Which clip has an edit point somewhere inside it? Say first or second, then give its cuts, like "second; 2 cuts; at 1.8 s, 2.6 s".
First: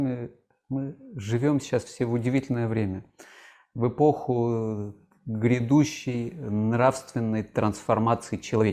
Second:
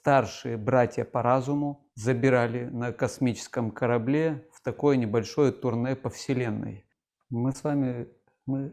second; 2 cuts; at 1.9 s, 6.8 s